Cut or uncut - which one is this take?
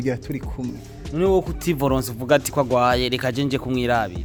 uncut